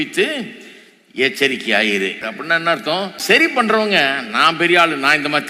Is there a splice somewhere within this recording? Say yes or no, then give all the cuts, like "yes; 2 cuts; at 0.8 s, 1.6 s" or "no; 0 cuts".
yes; 2 cuts; at 2.3 s, 3.4 s